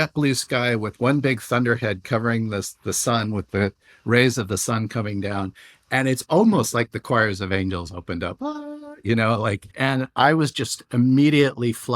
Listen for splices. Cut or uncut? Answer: cut